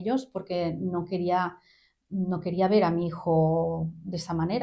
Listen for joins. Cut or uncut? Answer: uncut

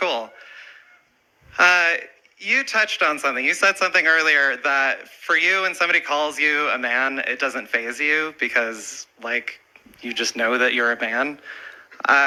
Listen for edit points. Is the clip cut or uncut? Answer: uncut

